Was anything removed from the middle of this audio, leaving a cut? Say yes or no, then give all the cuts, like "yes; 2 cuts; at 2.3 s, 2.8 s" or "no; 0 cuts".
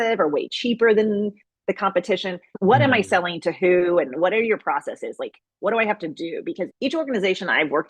yes; 2 cuts; at 2.4 s, 6.7 s